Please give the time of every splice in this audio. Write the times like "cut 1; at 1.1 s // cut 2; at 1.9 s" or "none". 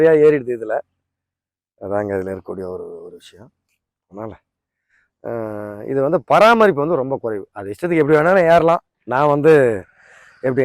cut 1; at 9.0 s